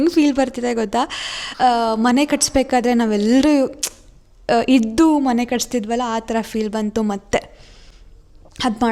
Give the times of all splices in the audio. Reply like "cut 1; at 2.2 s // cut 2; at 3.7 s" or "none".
none